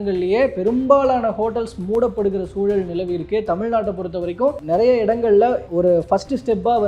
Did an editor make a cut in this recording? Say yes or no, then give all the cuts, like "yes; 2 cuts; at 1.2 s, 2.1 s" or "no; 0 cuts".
yes; 2 cuts; at 4.6 s, 5.6 s